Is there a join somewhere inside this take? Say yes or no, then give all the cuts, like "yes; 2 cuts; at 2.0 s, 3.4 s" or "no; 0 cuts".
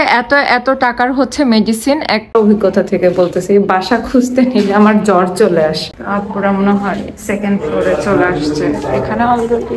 yes; 2 cuts; at 2.3 s, 5.9 s